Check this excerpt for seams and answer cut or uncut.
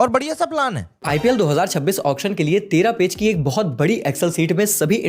cut